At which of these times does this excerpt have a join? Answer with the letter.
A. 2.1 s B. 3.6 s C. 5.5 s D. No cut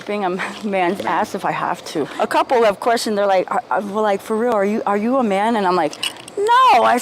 A